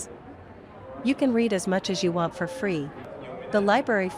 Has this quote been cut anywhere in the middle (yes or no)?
yes